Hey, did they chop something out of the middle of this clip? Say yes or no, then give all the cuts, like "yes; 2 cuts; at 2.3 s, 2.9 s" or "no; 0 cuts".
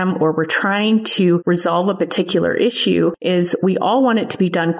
yes; 2 cuts; at 1.4 s, 3.2 s